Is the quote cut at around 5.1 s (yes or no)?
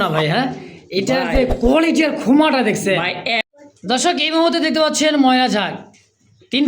no